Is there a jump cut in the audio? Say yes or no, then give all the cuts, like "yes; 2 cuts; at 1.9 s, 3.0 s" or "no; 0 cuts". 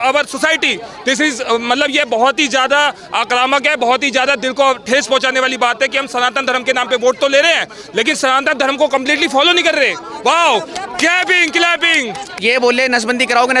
no; 0 cuts